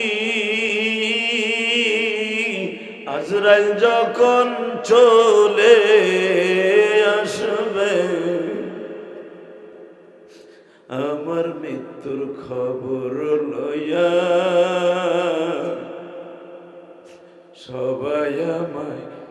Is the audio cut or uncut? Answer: cut